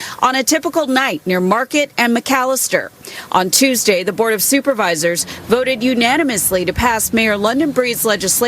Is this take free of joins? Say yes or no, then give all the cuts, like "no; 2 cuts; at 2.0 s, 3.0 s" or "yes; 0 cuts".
no; 1 cut; at 3.3 s